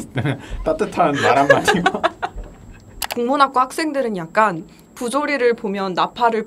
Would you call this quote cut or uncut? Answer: cut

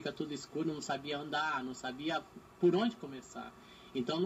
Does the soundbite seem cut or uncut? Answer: uncut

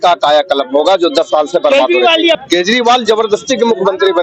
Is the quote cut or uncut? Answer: cut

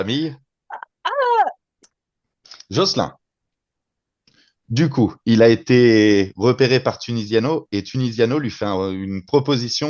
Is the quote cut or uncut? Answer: cut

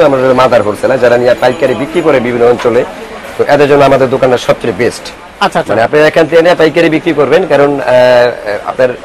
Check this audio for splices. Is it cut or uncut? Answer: uncut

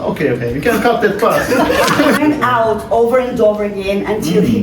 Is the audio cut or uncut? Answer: cut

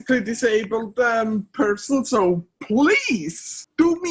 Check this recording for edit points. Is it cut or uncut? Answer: uncut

